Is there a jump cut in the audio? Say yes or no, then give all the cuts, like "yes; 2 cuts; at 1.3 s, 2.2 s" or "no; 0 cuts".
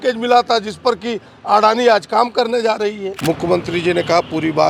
yes; 1 cut; at 3.1 s